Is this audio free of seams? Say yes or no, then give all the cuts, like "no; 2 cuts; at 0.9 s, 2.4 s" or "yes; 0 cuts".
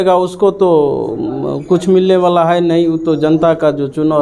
yes; 0 cuts